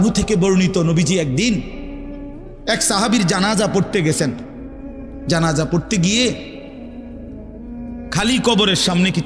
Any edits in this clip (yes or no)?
no